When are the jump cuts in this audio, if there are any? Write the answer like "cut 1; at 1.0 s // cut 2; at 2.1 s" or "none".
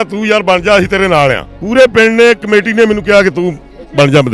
cut 1; at 1.5 s